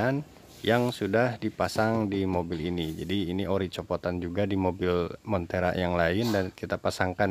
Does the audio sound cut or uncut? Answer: uncut